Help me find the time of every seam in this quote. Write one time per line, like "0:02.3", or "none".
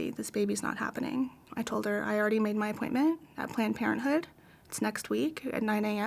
0:01.5

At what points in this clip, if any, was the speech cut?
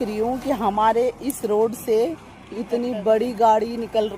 none

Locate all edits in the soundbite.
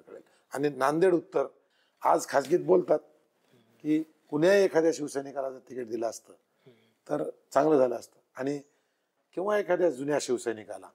0:01.6
0:09.2

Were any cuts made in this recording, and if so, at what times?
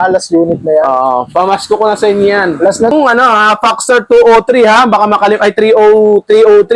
0:02.9

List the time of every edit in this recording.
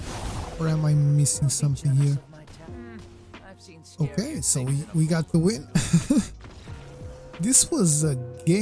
none

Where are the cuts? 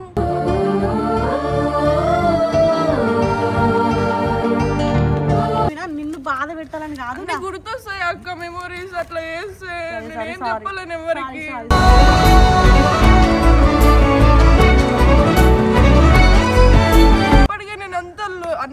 0:05.8
0:17.5

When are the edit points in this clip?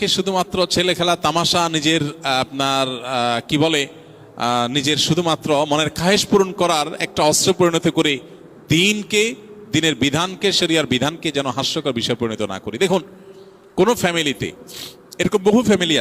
none

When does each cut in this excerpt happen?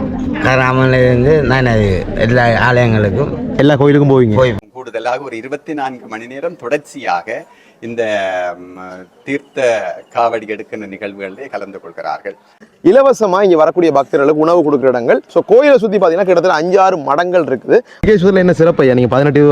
0:04.6
0:12.6
0:18.0

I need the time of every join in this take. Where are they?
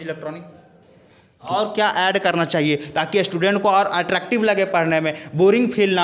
0:01.5

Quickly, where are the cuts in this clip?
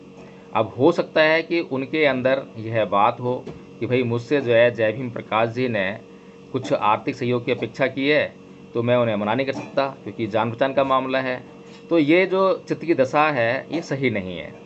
none

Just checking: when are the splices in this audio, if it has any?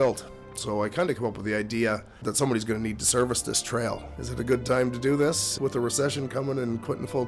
0:04.1
0:05.5

